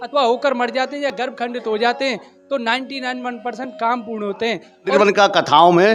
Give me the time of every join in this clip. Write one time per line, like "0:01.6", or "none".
0:04.9